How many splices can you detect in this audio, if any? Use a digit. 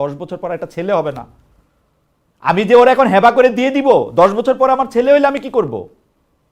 0